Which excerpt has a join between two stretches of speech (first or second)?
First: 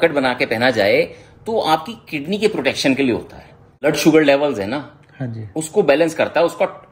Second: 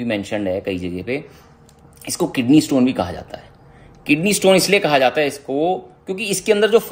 first